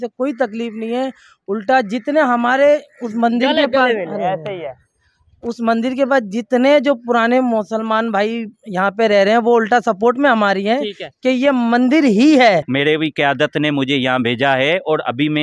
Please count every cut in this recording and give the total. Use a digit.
1